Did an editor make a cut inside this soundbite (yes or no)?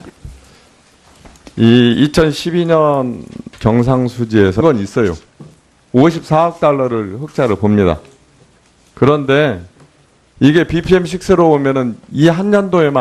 no